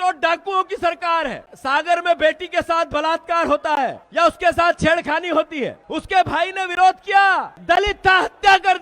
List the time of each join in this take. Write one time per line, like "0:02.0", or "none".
0:01.5
0:04.0
0:05.9
0:07.5